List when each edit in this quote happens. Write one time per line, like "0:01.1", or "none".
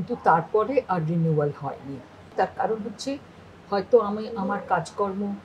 0:02.3

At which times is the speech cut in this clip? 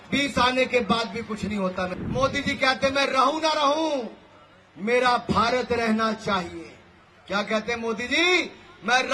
0:02.0

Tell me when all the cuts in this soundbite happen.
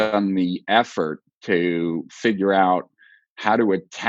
none

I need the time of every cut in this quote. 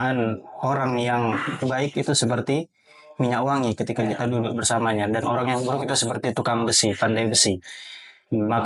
none

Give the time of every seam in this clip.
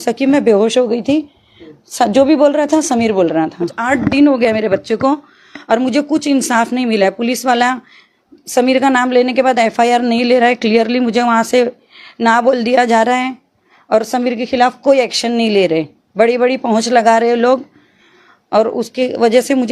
0:03.8

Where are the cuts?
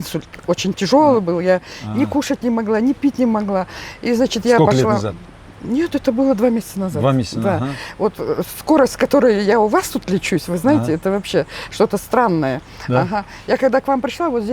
none

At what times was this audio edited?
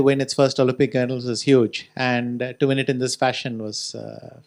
none

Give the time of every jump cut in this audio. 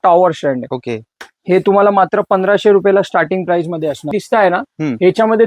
0:04.1

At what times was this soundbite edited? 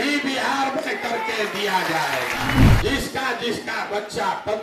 0:02.8

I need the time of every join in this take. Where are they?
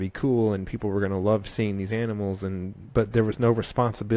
none

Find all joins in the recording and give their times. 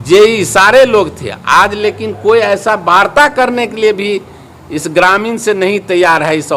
none

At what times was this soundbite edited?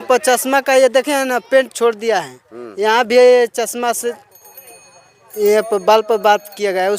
none

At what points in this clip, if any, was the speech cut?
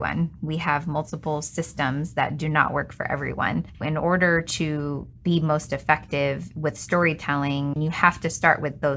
0:03.7
0:07.8

